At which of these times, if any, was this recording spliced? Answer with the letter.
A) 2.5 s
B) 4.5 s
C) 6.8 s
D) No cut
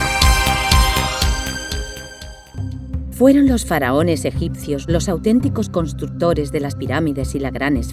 A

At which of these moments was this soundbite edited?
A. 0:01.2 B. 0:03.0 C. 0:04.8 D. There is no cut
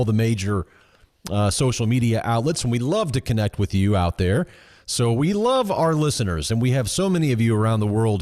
C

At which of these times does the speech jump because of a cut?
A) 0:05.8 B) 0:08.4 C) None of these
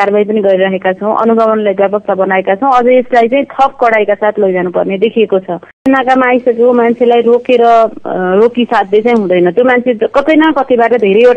A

